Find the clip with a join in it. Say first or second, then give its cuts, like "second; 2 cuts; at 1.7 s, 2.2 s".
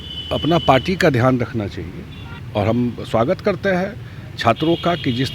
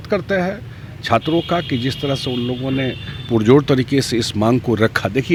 first; 1 cut; at 2.4 s